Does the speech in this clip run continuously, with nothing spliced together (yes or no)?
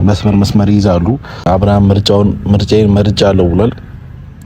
no